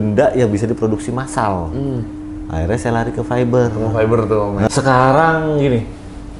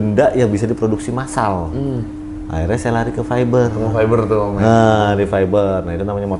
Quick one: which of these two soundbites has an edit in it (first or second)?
first